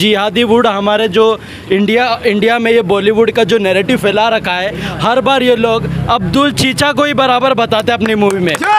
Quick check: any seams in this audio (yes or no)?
no